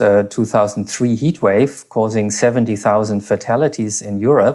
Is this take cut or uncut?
uncut